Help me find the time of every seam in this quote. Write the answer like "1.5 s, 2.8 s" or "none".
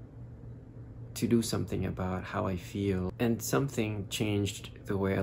3.1 s